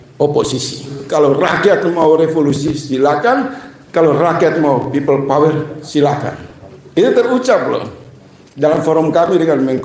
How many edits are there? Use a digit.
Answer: 1